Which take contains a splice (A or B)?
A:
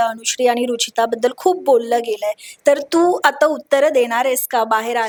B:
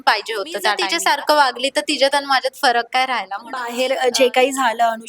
B